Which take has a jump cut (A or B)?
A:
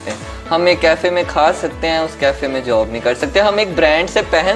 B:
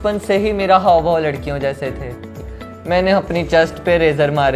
B